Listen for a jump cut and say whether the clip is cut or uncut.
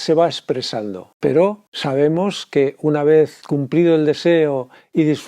cut